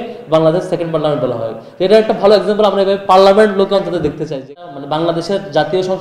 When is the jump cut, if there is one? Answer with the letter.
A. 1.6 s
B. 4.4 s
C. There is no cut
B